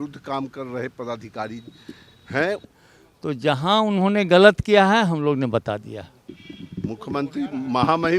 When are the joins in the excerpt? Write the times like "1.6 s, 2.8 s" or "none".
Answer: 2.7 s, 6.2 s